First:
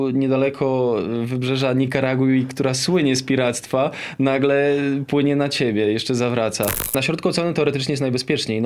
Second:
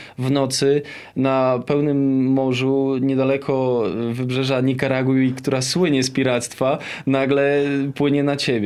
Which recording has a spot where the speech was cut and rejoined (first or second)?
first